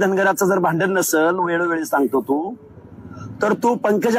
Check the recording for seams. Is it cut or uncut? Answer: uncut